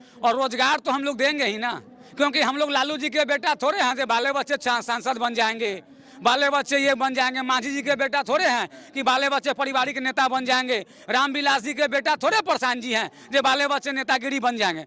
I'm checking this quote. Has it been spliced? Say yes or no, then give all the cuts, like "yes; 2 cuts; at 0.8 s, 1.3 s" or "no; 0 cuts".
no; 0 cuts